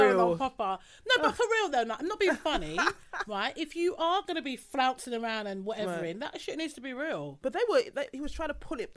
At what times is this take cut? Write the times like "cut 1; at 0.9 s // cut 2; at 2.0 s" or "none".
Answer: none